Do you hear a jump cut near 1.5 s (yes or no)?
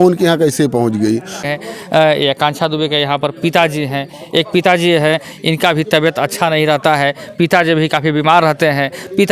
yes